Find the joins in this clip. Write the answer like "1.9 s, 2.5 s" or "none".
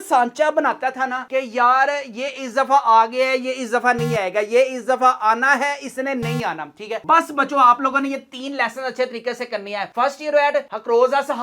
7.0 s